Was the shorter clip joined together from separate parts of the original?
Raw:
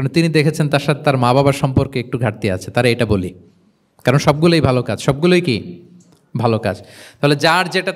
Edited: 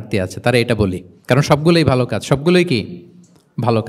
yes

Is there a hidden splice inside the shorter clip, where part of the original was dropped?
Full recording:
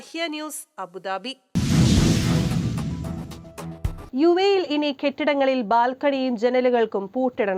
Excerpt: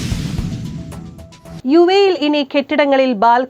yes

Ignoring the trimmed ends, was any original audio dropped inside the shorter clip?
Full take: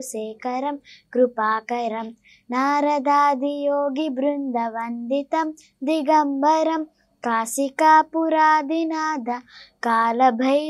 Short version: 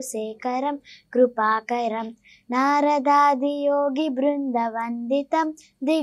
no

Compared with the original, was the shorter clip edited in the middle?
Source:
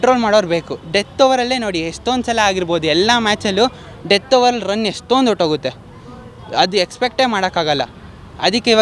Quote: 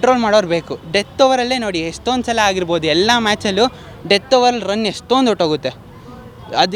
no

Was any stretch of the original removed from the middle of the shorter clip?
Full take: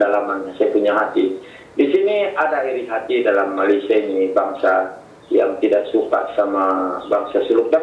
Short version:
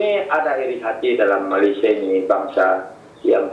no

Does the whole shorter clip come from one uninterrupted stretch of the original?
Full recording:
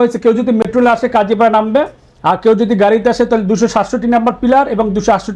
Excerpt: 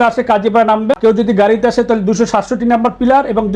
no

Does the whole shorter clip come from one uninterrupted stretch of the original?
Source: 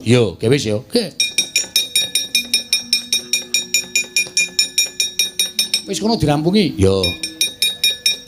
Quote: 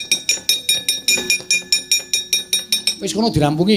no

